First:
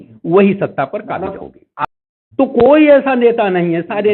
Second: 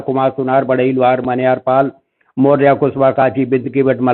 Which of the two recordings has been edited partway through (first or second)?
first